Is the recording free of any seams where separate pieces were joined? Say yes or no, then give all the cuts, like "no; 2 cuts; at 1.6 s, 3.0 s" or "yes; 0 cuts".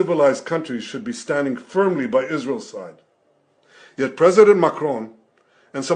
yes; 0 cuts